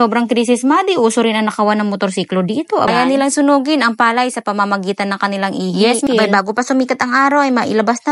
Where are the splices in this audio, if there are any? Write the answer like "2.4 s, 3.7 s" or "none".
2.9 s, 6.1 s